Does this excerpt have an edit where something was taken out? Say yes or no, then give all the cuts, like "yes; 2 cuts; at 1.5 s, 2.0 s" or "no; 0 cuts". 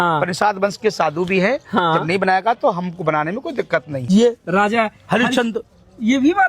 yes; 1 cut; at 4.0 s